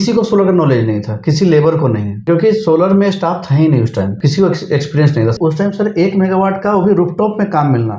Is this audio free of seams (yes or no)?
no